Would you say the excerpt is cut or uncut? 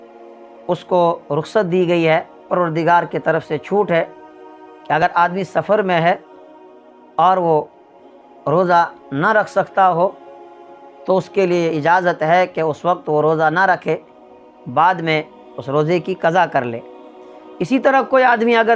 uncut